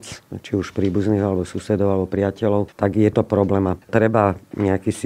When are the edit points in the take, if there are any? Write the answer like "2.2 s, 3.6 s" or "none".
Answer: 2.7 s, 3.8 s